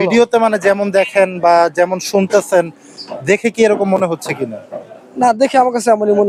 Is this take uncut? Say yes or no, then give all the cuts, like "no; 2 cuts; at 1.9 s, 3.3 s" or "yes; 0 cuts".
yes; 0 cuts